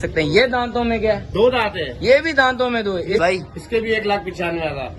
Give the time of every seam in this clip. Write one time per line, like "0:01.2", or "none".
0:03.2